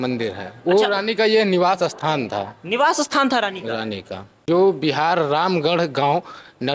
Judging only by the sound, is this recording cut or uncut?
cut